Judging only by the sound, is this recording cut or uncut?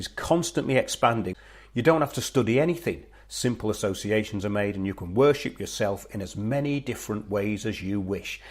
cut